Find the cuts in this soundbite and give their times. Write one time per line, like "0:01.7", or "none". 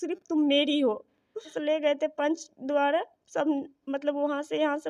0:01.5

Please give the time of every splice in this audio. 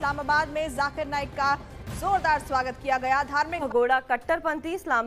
0:03.5

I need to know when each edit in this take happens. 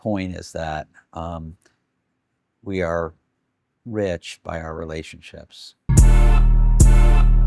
0:05.6

